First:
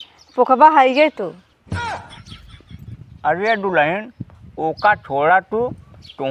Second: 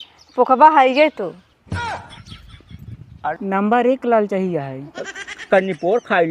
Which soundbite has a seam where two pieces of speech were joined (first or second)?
second